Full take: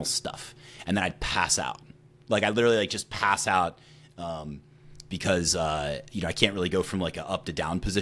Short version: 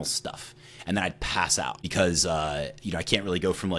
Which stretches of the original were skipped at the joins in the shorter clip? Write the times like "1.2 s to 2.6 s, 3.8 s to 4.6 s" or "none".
1.8 s to 5.1 s